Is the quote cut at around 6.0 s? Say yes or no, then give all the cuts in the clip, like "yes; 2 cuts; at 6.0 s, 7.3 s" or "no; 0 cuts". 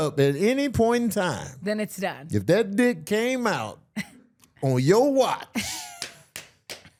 no; 0 cuts